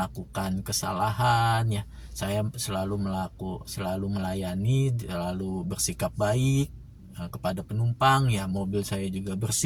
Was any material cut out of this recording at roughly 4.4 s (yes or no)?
no